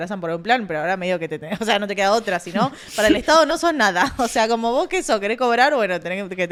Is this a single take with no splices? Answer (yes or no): yes